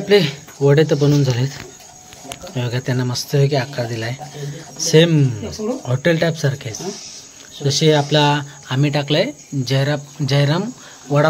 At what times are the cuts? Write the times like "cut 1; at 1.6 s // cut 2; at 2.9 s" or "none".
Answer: none